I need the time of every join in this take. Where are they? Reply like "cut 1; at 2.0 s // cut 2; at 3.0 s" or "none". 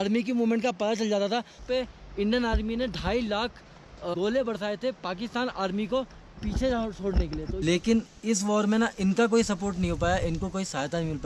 cut 1; at 1.6 s // cut 2; at 4.1 s // cut 3; at 7.6 s